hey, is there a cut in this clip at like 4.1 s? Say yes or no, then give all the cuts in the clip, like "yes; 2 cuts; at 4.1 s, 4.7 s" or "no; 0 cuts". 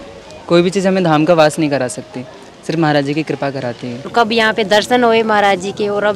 yes; 1 cut; at 4.1 s